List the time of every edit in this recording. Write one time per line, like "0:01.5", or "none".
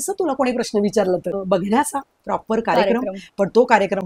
0:01.3